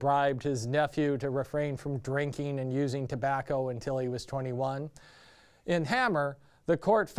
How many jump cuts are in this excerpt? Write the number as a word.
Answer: one